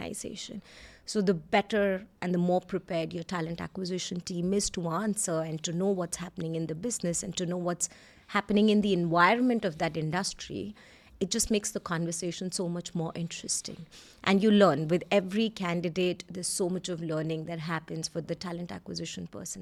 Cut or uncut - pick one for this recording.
uncut